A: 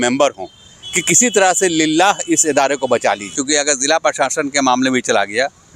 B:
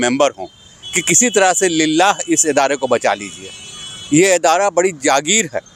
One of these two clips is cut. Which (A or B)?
A